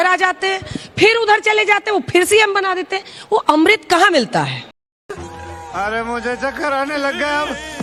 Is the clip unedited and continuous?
yes; 0 cuts

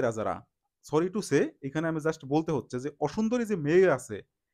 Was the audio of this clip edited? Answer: no; 0 cuts

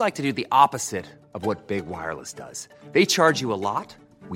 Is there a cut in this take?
no; 0 cuts

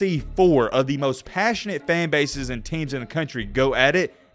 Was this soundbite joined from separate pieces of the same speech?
no; 0 cuts

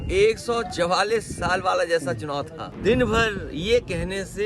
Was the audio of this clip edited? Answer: yes; 1 cut; at 2.6 s

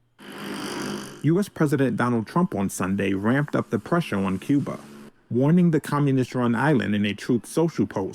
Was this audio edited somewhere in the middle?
no; 0 cuts

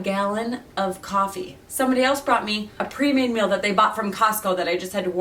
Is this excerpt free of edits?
yes; 0 cuts

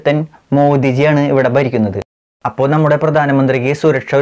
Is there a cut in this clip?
yes; 1 cut; at 2.1 s

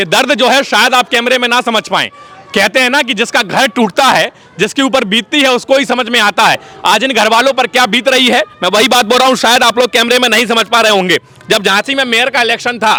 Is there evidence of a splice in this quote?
no; 0 cuts

